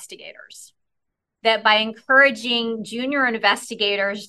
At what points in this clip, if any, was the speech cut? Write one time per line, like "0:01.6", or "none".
none